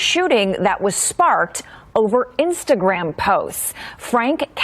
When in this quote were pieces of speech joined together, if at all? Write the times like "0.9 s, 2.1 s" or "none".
1.7 s